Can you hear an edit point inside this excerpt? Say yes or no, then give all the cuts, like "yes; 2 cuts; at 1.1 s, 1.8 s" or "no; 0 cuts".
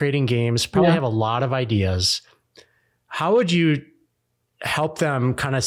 no; 0 cuts